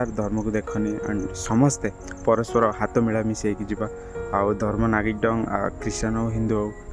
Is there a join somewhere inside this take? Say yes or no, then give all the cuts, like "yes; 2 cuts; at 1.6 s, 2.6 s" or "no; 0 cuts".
no; 0 cuts